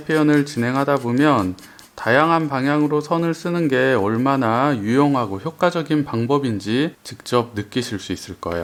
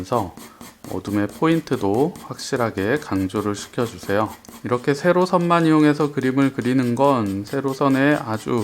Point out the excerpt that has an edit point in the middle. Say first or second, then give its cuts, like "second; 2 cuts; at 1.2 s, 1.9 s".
second; 1 cut; at 4.5 s